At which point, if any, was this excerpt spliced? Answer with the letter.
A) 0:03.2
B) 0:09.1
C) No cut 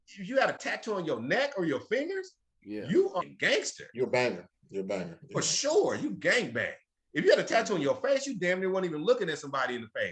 A